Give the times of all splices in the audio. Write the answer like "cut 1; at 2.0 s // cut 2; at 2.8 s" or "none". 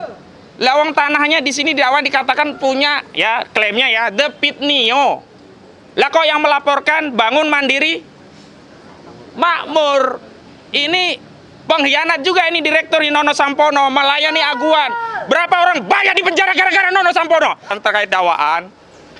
cut 1; at 17.7 s